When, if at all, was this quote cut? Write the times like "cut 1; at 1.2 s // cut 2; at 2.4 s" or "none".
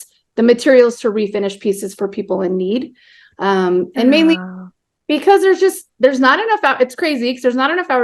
none

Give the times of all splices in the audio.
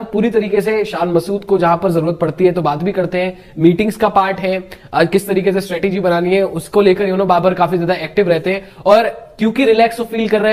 none

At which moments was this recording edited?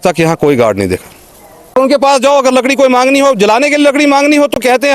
cut 1; at 1.7 s

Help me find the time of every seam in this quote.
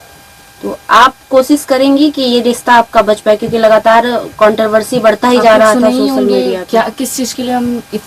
none

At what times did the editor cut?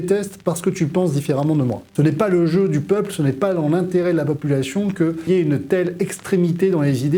cut 1; at 1.9 s // cut 2; at 5.2 s

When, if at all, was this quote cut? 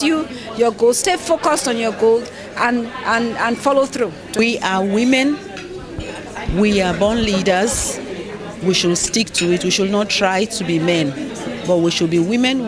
cut 1; at 4.4 s

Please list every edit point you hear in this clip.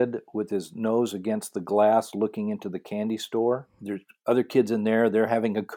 cut 1; at 3.8 s

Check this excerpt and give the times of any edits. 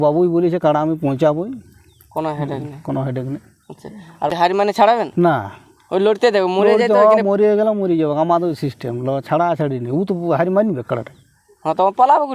cut 1; at 4.3 s

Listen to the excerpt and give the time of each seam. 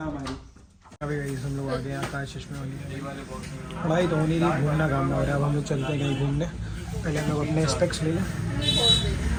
none

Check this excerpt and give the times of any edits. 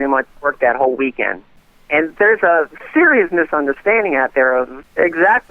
none

